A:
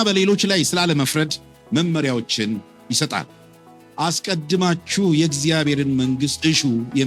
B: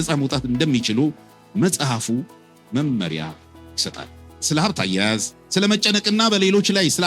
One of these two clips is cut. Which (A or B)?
B